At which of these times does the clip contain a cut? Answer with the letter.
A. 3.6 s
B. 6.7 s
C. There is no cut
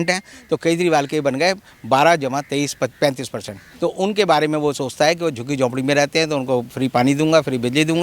A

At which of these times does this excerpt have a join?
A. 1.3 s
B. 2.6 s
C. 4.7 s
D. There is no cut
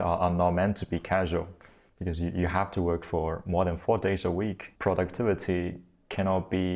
C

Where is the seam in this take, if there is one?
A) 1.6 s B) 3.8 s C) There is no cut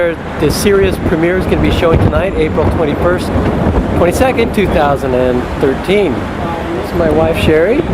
B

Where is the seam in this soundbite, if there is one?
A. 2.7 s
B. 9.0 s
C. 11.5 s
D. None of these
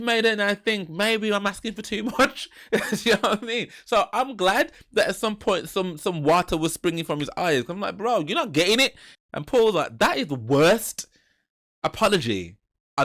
B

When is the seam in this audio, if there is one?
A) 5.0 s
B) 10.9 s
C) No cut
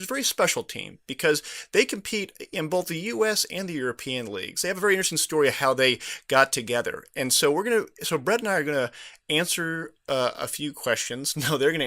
A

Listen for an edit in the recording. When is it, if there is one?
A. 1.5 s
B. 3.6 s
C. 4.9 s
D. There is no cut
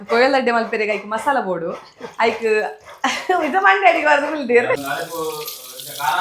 C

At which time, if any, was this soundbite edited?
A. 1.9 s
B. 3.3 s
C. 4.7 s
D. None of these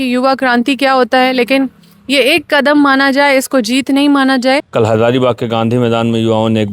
C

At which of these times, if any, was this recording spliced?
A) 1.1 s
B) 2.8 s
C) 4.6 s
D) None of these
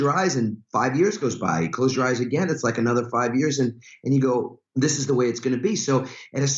C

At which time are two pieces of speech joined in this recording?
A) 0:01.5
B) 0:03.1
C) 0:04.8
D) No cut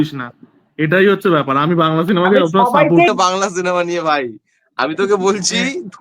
B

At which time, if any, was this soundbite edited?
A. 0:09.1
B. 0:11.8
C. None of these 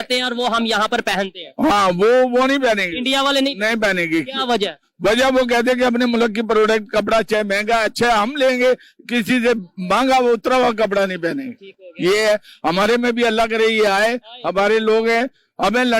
C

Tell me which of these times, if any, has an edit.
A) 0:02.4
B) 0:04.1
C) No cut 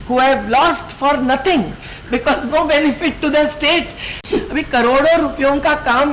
B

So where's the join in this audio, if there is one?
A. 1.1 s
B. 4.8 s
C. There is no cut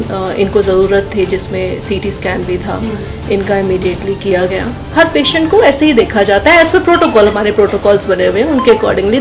B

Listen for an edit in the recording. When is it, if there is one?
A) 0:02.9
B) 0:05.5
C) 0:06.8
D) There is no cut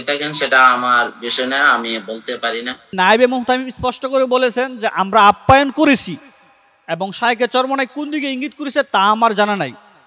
A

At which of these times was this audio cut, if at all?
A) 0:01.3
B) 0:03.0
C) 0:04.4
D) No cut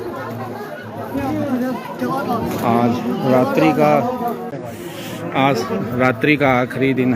C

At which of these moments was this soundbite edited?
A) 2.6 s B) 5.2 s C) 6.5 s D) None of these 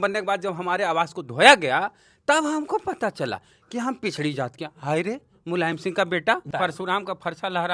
C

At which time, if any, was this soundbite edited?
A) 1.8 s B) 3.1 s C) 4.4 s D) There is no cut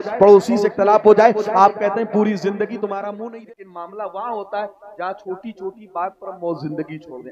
B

